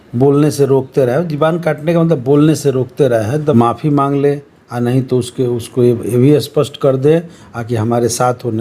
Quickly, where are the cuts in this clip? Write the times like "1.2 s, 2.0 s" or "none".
3.5 s